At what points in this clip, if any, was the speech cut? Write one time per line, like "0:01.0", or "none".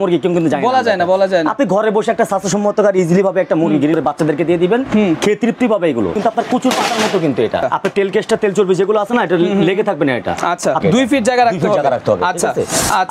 0:03.9
0:06.2
0:07.6
0:10.8